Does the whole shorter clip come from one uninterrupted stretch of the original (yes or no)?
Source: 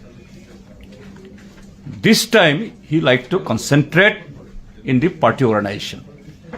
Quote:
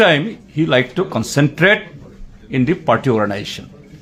yes